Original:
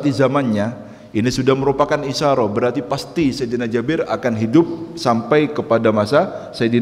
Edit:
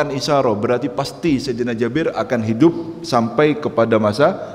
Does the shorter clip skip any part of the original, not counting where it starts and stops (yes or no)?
no